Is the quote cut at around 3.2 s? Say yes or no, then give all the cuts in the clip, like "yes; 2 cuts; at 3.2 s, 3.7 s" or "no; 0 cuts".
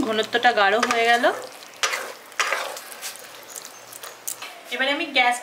no; 1 cut; at 4.5 s